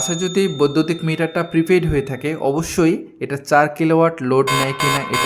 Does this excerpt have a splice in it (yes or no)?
no